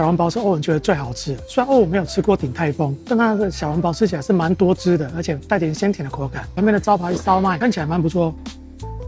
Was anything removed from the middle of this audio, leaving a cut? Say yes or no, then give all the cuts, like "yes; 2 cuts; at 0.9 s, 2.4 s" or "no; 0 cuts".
no; 0 cuts